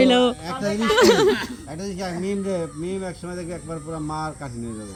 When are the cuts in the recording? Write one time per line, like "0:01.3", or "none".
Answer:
none

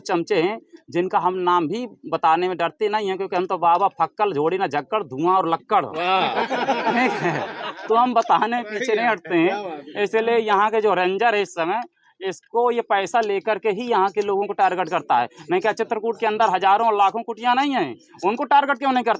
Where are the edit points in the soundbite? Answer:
none

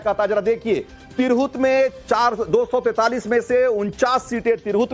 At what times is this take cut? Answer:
0:02.9

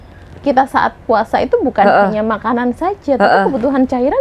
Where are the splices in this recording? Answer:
none

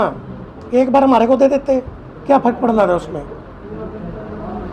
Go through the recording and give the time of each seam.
none

